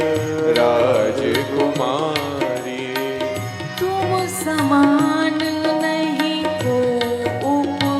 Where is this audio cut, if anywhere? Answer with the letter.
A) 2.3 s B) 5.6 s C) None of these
A